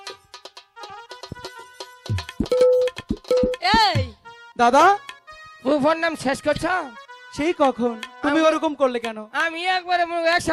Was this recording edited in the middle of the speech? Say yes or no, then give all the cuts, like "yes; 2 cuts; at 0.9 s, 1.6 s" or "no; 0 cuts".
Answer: no; 0 cuts